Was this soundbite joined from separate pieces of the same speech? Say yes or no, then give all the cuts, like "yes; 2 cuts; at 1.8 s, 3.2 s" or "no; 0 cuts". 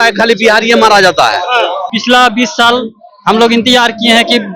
yes; 1 cut; at 1.9 s